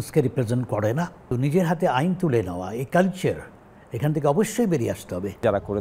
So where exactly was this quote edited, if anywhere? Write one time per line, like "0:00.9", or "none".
0:01.3